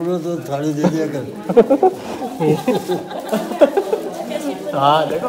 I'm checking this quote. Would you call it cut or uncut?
uncut